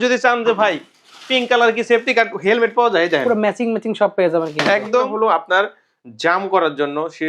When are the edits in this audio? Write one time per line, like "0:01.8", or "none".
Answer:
0:05.1